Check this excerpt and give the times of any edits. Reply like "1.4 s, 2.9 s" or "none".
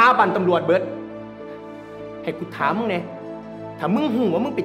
none